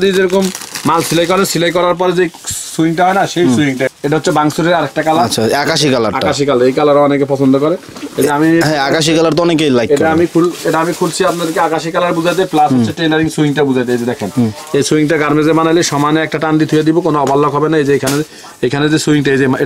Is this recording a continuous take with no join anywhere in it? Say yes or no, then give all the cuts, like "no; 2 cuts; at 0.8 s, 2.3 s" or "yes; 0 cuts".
yes; 0 cuts